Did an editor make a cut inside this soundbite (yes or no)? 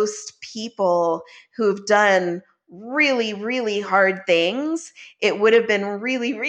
no